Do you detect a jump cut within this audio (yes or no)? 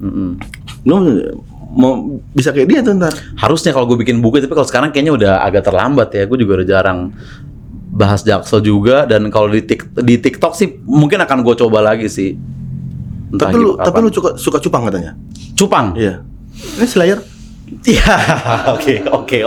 no